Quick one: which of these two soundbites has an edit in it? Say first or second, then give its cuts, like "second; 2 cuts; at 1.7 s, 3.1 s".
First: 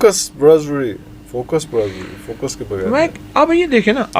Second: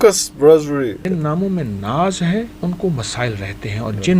second; 2 cuts; at 1.0 s, 2.5 s